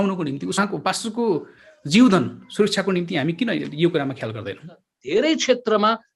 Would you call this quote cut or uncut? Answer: cut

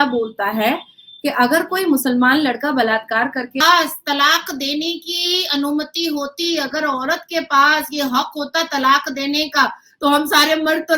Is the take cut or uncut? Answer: cut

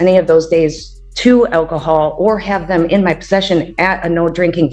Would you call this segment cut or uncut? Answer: uncut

